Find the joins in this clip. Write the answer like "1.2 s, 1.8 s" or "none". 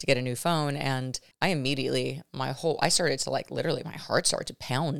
1.2 s